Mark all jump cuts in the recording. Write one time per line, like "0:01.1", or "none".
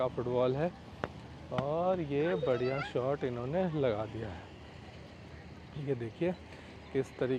none